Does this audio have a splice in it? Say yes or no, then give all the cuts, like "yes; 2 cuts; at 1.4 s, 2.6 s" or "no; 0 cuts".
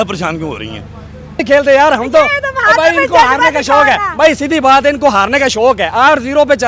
yes; 1 cut; at 1.4 s